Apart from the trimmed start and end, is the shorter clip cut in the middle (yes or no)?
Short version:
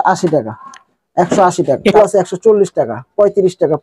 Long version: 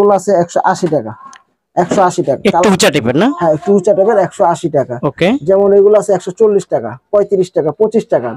yes